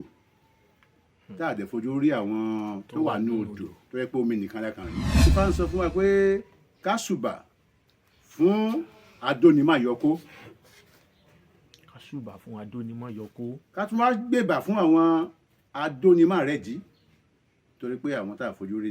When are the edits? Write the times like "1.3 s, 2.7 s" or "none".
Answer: 5.1 s